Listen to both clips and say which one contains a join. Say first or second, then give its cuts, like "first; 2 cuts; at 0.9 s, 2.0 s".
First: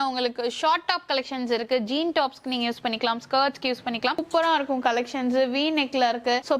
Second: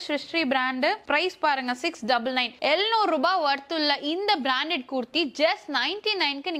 first; 1 cut; at 4.2 s